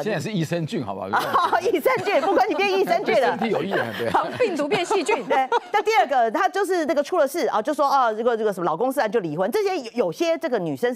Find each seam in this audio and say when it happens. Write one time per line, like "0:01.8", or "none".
none